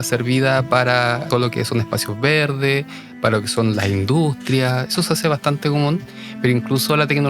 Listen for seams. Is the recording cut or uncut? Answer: cut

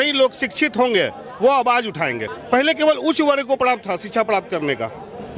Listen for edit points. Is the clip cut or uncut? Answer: cut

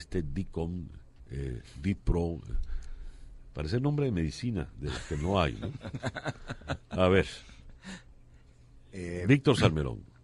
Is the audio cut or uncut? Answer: uncut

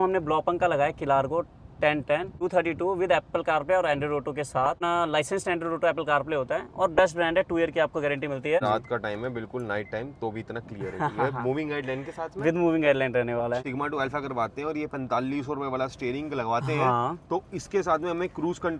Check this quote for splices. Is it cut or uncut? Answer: cut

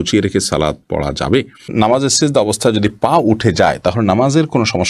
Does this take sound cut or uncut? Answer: cut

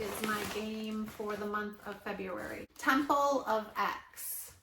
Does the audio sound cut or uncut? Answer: cut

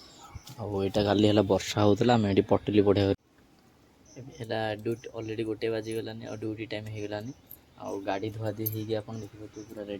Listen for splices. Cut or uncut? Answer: cut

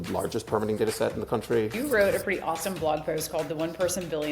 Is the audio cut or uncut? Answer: cut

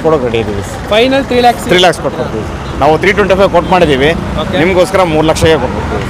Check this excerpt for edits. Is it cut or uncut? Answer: uncut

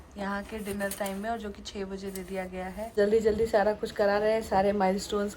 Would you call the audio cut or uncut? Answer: cut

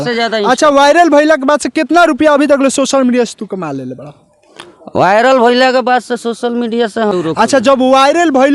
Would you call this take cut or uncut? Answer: cut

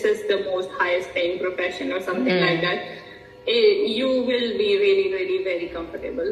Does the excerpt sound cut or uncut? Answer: uncut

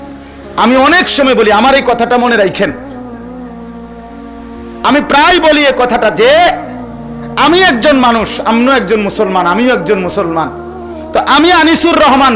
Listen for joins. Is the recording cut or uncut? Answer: cut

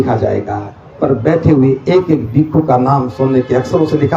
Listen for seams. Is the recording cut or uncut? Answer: cut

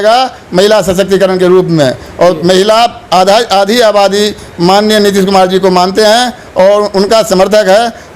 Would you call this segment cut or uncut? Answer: uncut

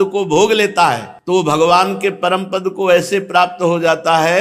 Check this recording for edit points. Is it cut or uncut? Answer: cut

